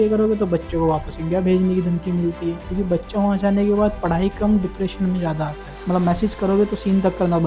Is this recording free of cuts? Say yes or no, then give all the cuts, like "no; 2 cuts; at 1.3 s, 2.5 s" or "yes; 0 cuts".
no; 2 cuts; at 2.6 s, 5.7 s